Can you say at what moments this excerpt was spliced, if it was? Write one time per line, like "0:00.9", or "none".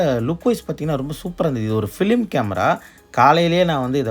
none

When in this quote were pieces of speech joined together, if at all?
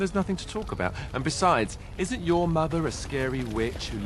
0:01.0

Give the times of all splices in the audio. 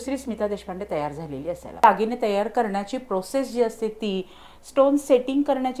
0:01.8

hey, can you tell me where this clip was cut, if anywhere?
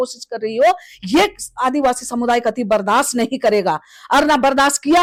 none

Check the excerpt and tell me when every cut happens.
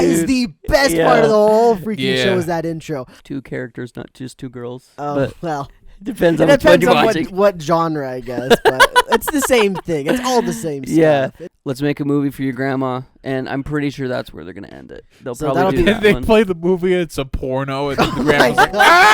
0:03.2
0:11.4

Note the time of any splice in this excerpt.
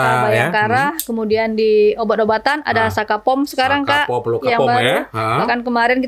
none

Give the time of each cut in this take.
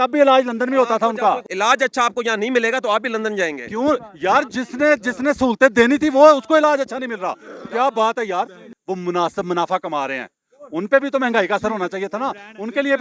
0:01.5
0:08.7

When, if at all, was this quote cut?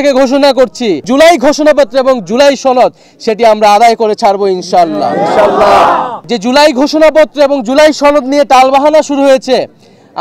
0:01.0
0:06.1

